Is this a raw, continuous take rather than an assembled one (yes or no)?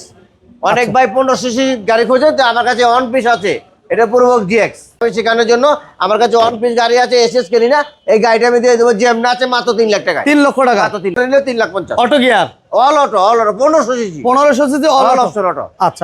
no